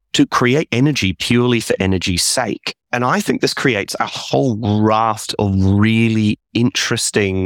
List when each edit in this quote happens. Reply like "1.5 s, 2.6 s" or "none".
none